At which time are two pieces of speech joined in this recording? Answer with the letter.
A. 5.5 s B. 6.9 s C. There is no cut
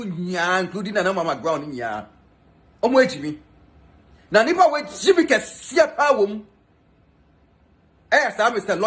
C